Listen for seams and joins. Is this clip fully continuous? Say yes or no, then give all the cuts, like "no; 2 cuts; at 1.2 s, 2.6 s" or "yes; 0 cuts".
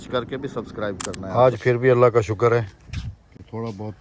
no; 1 cut; at 1.3 s